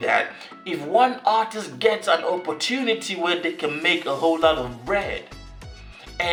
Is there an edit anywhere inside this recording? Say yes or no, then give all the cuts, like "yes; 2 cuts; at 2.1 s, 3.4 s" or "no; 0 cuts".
no; 0 cuts